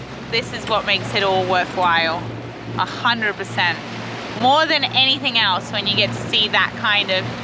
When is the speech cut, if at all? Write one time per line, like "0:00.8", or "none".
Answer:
none